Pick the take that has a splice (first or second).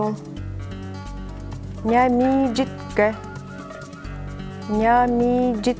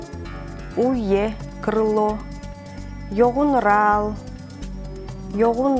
first